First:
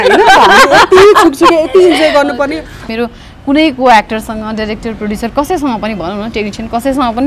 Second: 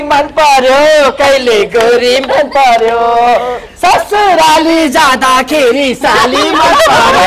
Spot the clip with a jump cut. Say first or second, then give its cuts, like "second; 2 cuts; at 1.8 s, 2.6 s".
first; 1 cut; at 2.9 s